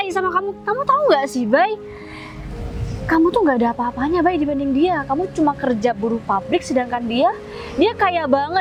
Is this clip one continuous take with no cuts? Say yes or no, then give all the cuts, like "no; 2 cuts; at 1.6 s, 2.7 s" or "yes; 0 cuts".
yes; 0 cuts